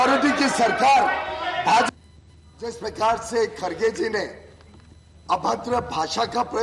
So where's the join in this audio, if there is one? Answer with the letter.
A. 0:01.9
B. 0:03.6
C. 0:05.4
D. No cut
A